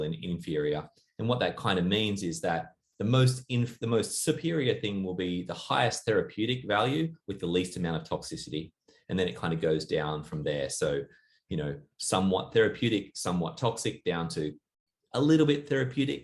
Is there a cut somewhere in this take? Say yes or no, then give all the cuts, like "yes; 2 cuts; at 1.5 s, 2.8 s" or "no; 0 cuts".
no; 0 cuts